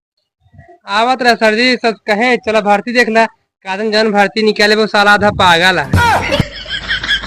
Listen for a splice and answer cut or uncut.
cut